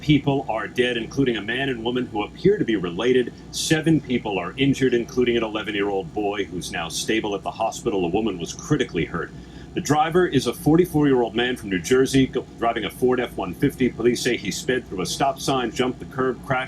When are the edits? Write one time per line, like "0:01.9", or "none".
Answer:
0:08.8